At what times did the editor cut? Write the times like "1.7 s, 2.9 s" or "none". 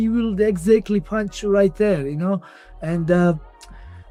none